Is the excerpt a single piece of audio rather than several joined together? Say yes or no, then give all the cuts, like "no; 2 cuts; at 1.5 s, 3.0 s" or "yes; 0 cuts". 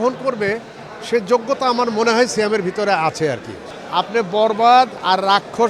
no; 1 cut; at 3.6 s